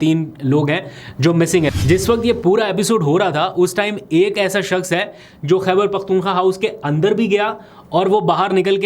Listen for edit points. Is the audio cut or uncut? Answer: cut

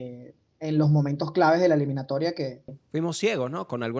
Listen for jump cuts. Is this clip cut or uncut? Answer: cut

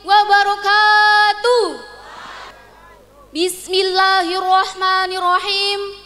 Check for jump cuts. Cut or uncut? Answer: cut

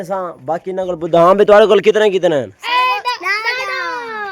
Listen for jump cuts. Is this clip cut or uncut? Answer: uncut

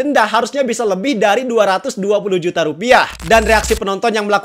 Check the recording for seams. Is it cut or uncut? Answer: cut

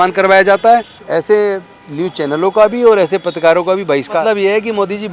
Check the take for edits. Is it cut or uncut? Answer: cut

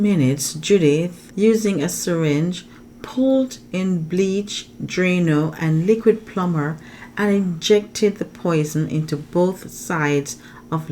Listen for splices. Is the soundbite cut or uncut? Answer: cut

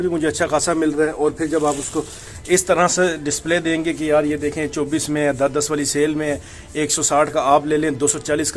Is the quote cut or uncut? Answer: uncut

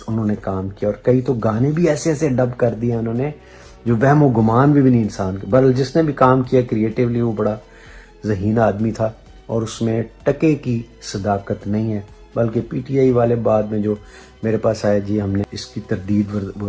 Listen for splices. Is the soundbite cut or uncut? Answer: cut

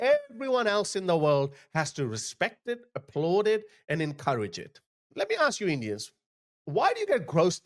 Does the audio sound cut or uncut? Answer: uncut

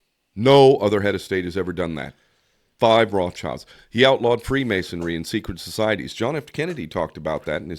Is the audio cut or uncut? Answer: uncut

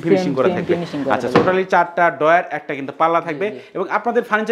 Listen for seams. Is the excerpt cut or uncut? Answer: uncut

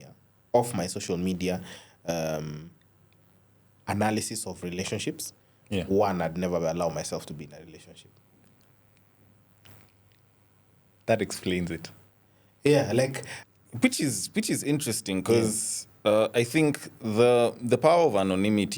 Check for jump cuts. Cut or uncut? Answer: cut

